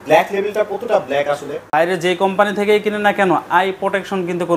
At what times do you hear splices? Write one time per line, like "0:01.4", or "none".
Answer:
0:01.7